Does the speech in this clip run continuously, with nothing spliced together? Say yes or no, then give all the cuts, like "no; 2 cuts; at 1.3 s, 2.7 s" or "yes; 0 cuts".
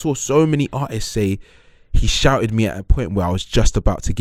yes; 0 cuts